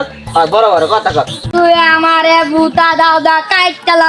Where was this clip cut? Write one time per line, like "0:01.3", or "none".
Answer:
0:01.5